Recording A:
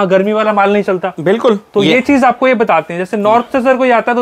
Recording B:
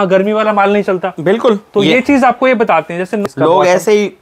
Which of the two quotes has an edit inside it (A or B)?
B